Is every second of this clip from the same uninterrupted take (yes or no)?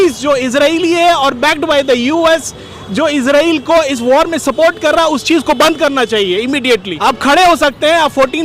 no